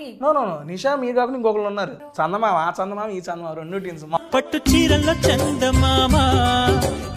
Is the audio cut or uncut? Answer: cut